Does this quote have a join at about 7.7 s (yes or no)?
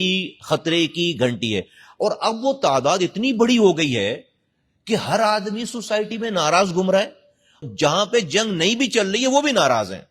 yes